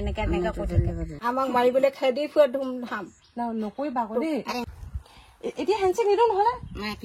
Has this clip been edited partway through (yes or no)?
yes